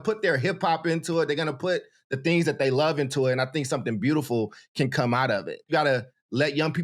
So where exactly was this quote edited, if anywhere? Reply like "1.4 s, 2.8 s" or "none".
5.7 s